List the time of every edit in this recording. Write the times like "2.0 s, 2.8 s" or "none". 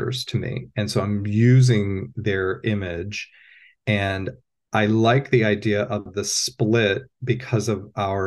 none